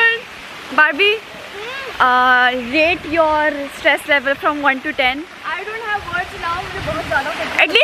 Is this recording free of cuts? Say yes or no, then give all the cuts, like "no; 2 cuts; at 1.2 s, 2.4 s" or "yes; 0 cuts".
yes; 0 cuts